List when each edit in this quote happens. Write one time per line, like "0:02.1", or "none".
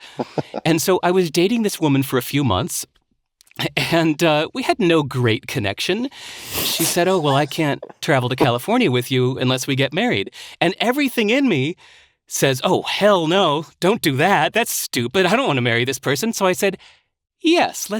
none